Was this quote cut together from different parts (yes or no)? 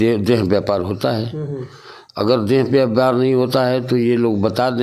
no